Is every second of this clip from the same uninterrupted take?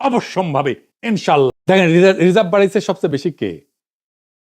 no; 1 cut; at 1.5 s

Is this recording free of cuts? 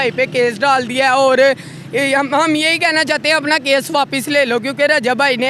yes; 0 cuts

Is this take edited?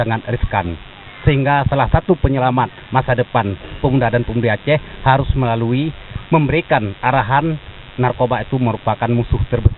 no; 0 cuts

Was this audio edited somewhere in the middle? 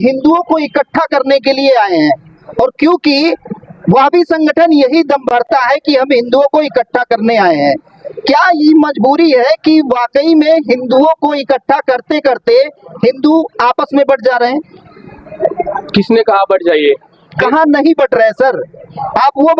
no; 0 cuts

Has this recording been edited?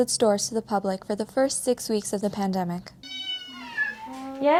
no; 0 cuts

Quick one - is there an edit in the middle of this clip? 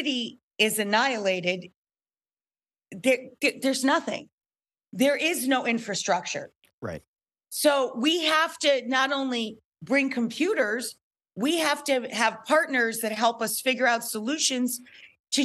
no; 0 cuts

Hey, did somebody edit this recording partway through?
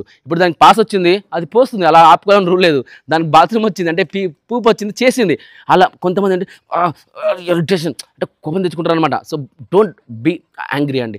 no; 0 cuts

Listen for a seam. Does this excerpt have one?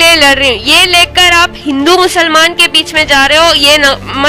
no; 0 cuts

